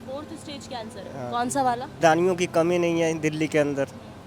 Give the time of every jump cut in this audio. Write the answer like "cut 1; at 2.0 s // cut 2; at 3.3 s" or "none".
cut 1; at 2.0 s